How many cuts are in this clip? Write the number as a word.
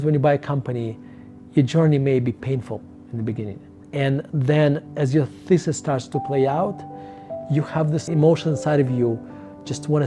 zero